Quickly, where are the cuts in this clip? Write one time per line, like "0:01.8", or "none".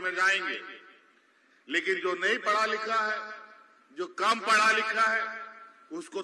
none